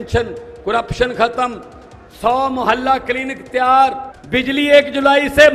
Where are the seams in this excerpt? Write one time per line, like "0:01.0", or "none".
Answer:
0:04.1